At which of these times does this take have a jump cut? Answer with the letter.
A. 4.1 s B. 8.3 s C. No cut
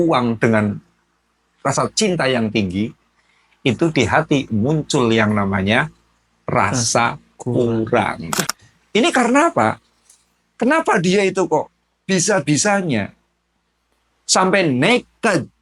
B